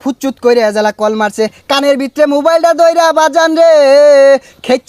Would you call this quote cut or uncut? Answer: uncut